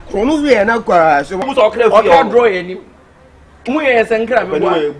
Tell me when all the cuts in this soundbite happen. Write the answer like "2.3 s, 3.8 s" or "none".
1.4 s